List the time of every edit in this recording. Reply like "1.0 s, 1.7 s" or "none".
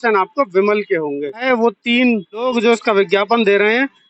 1.4 s, 2.3 s